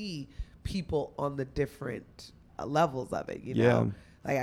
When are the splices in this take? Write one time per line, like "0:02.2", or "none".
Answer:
none